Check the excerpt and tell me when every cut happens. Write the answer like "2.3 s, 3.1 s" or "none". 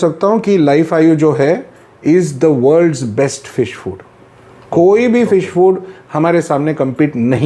none